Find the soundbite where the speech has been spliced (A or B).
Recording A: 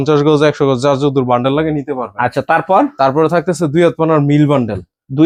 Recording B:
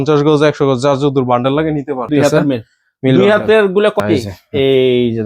B